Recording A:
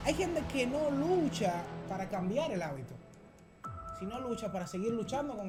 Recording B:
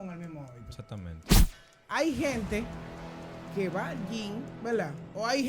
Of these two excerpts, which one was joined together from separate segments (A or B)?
B